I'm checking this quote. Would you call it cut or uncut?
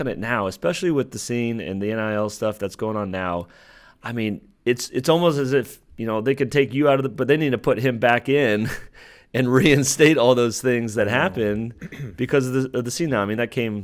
uncut